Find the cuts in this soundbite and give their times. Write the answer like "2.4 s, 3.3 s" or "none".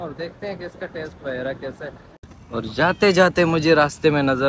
2.3 s